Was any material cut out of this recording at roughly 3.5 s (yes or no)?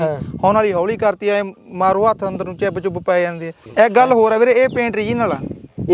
yes